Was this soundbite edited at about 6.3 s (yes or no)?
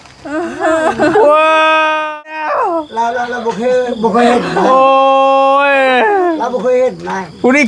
no